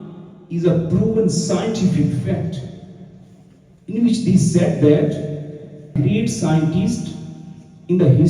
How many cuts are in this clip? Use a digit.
1